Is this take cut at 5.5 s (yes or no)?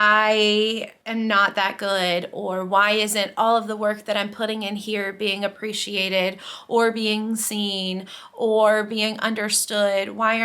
no